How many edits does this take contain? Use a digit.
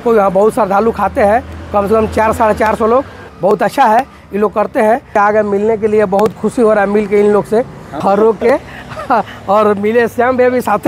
3